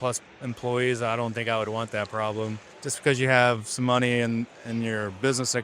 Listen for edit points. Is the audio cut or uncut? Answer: cut